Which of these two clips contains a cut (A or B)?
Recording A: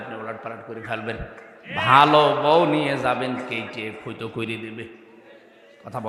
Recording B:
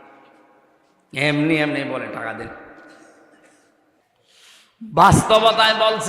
B